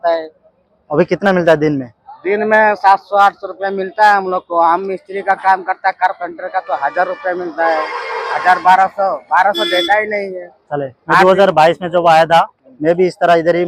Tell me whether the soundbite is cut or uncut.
uncut